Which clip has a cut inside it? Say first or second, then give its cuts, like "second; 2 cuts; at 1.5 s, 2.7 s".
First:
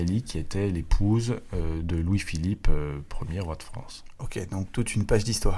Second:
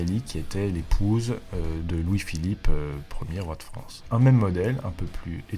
second; 1 cut; at 3.9 s